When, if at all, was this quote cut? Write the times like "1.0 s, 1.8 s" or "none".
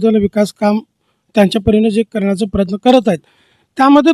none